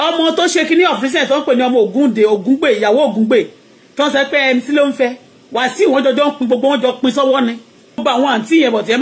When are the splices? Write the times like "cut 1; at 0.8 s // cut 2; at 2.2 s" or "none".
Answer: cut 1; at 8.0 s

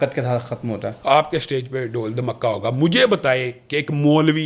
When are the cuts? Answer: cut 1; at 0.9 s

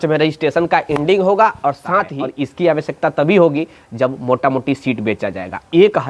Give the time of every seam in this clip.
cut 1; at 2.2 s

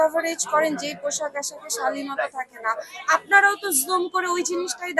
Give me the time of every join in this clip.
none

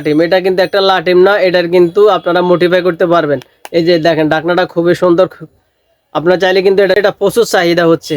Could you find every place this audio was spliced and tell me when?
cut 1; at 7.0 s

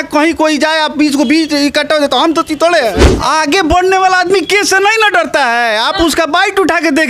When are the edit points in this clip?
cut 1; at 3.0 s

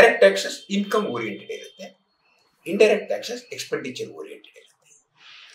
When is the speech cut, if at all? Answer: none

